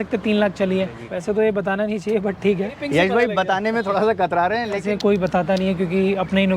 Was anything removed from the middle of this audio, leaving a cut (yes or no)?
yes